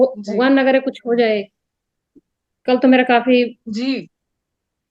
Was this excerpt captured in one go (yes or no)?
yes